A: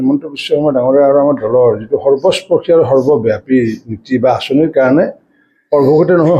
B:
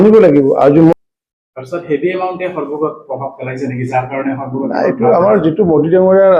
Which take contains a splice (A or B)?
B